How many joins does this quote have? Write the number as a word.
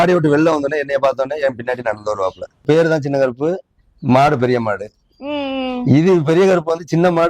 one